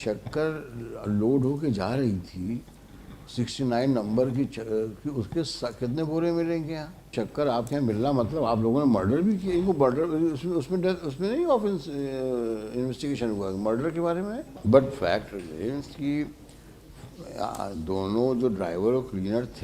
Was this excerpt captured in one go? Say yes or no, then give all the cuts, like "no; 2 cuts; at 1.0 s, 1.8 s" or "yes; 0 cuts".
no; 2 cuts; at 7.1 s, 14.5 s